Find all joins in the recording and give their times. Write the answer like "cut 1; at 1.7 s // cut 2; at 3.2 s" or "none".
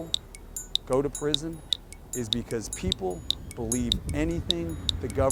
none